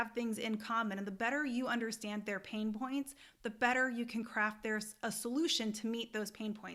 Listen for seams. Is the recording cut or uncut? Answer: uncut